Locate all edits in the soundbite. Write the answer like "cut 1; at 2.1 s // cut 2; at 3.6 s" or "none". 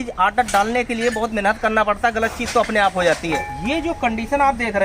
cut 1; at 3.4 s